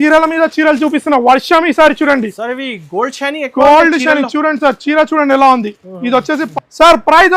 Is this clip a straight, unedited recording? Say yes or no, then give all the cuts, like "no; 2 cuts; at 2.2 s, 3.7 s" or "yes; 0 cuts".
no; 1 cut; at 6.5 s